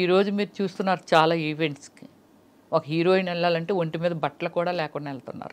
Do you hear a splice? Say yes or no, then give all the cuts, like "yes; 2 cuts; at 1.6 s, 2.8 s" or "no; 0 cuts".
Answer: no; 0 cuts